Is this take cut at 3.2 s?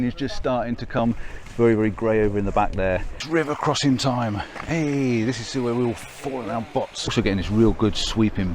yes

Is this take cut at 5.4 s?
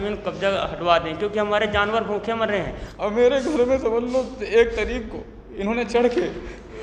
no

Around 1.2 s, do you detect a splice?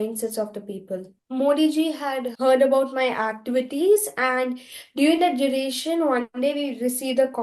yes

